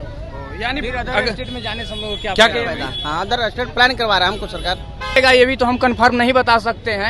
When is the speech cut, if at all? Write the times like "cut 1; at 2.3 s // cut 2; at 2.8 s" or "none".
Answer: cut 1; at 5.2 s

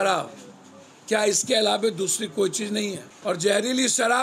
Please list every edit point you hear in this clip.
cut 1; at 3.1 s

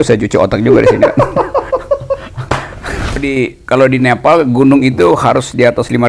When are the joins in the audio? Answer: cut 1; at 3.3 s

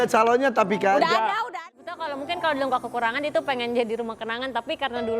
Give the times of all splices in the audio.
cut 1; at 1.4 s

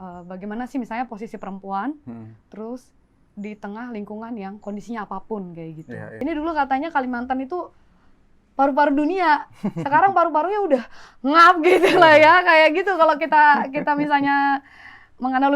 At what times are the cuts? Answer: cut 1; at 6.2 s

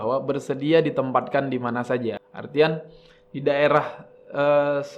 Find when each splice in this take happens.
cut 1; at 2.3 s

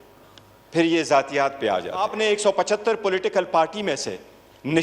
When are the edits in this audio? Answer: cut 1; at 2.1 s

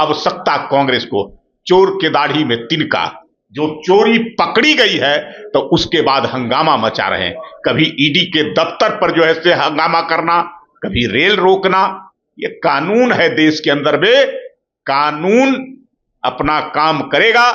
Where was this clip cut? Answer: none

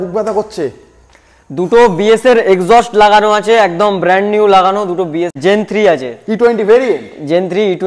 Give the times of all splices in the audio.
cut 1; at 5.3 s

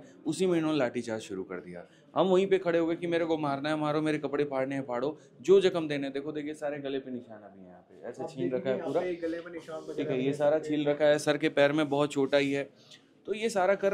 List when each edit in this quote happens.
none

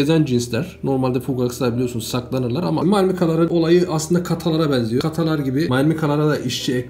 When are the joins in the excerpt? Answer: cut 1; at 2.8 s // cut 2; at 5.2 s

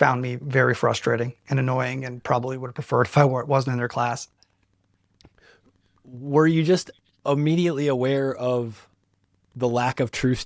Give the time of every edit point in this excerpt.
none

